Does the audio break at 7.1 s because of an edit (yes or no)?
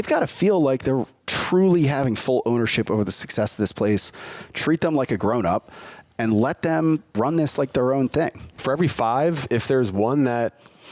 yes